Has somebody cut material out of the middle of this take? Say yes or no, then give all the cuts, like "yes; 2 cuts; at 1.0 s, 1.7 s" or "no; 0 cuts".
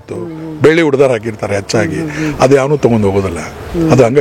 no; 0 cuts